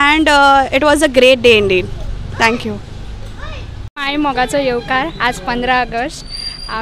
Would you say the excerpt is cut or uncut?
cut